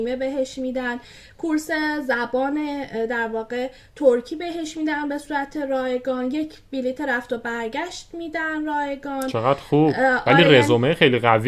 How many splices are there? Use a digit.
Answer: 0